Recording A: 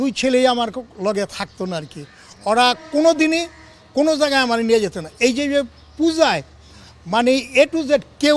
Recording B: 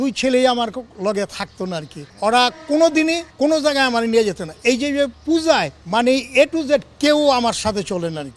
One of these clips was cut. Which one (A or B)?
B